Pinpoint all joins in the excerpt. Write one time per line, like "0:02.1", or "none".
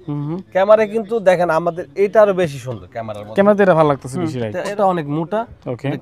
0:04.7